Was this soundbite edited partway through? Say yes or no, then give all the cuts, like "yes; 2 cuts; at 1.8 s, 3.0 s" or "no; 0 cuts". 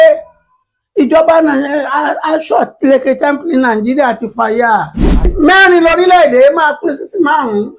yes; 1 cut; at 5.3 s